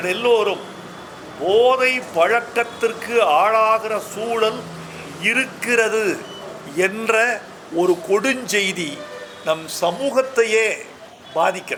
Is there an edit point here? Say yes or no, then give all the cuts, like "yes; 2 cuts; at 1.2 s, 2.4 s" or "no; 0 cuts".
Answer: no; 0 cuts